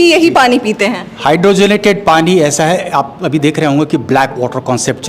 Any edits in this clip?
no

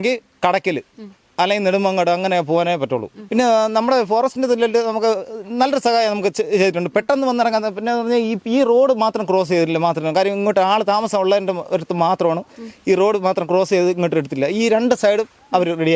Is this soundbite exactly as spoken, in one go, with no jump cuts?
no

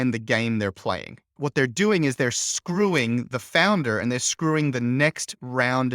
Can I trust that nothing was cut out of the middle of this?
no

